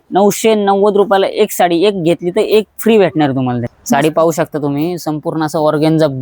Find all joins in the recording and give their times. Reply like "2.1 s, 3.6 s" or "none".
3.7 s

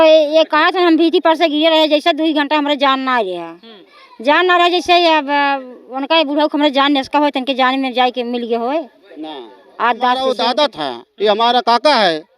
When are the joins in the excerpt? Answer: 10.3 s

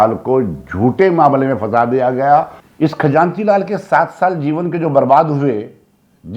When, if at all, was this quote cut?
2.6 s

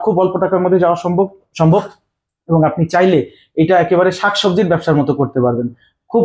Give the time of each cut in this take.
none

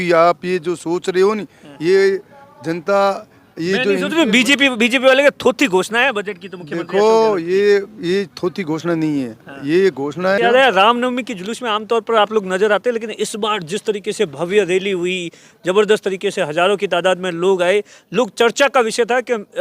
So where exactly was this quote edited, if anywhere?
10.4 s

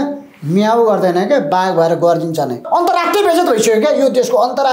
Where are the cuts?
2.6 s

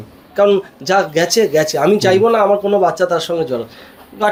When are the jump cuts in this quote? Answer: none

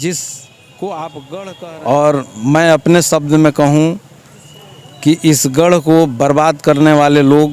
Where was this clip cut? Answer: 1.6 s

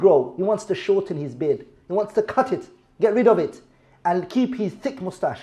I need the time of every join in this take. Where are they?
none

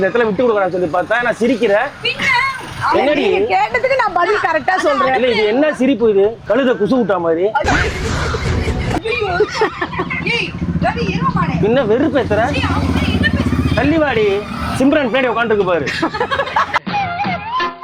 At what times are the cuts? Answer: none

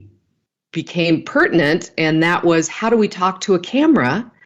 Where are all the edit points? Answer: none

